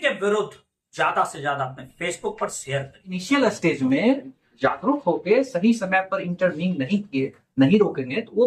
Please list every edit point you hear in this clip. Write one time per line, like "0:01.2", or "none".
0:03.1